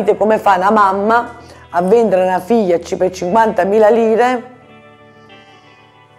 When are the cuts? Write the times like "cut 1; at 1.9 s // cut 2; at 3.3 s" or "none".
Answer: none